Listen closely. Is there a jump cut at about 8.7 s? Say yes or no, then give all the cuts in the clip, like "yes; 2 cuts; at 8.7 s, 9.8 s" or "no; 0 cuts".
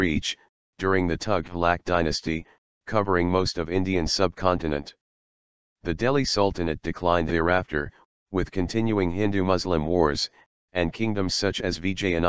no; 1 cut; at 1.9 s